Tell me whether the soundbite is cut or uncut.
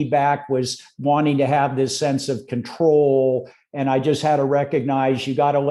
uncut